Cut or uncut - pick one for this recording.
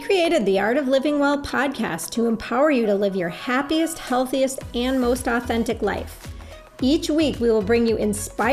uncut